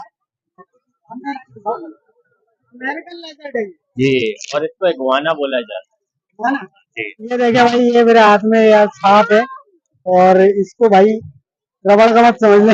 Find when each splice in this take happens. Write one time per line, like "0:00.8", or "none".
0:07.3